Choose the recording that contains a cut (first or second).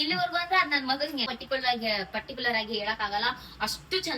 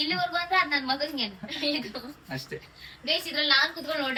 first